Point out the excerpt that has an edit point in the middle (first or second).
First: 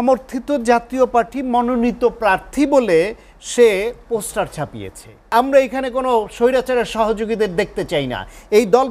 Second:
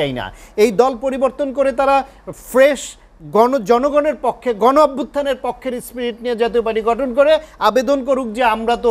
first